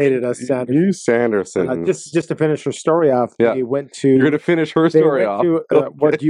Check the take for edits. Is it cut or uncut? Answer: uncut